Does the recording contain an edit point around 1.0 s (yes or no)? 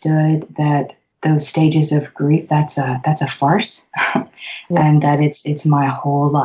yes